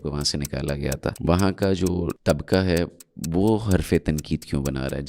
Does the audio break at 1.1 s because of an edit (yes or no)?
yes